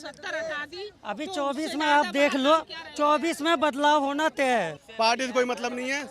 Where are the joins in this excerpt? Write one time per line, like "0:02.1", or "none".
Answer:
0:04.8